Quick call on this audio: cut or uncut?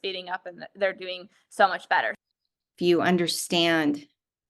cut